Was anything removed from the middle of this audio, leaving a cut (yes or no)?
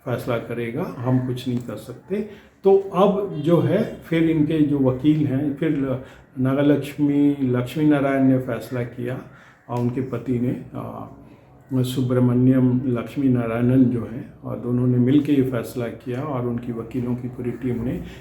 no